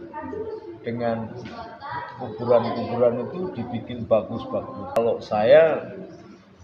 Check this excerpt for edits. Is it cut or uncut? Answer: cut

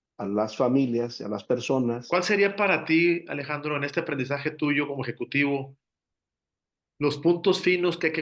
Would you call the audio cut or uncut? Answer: cut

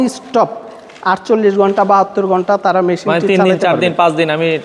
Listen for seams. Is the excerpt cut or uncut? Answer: uncut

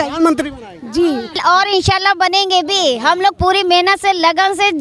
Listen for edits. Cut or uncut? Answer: cut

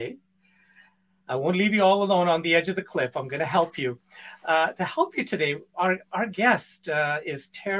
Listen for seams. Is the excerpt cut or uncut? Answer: uncut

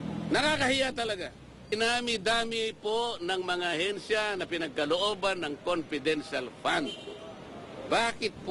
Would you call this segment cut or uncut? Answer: cut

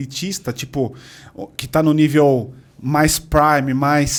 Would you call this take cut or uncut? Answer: uncut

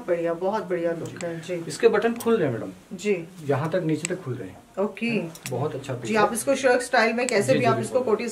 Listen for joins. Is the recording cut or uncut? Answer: uncut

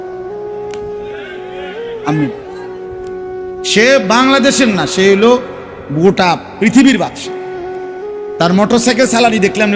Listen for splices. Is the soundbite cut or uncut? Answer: uncut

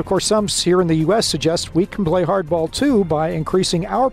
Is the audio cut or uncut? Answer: uncut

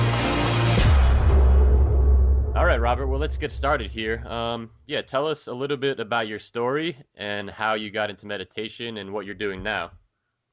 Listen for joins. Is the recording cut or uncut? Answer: uncut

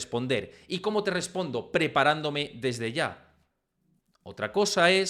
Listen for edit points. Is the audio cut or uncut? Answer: uncut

